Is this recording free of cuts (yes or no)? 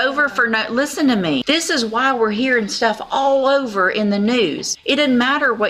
no